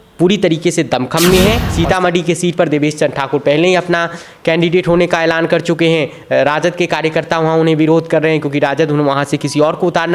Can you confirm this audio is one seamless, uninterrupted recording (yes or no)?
no